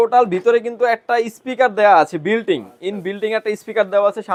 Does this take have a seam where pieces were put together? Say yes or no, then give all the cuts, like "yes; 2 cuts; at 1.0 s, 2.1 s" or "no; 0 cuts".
no; 0 cuts